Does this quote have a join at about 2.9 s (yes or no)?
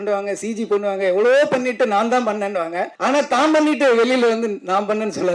yes